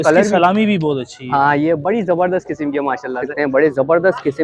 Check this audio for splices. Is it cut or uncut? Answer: cut